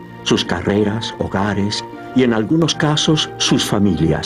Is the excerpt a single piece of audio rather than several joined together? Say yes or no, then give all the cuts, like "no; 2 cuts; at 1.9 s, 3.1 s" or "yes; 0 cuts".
yes; 0 cuts